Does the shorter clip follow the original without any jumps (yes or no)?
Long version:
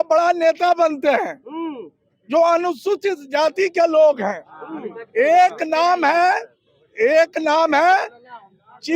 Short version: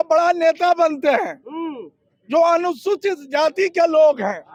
yes